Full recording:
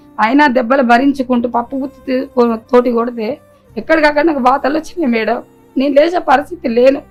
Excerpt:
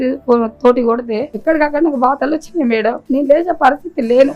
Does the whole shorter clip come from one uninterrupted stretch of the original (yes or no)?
no